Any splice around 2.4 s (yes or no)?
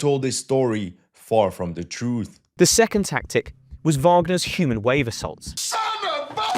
yes